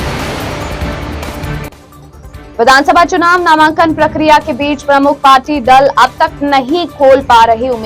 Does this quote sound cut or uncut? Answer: cut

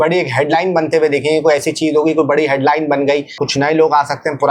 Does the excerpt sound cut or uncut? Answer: cut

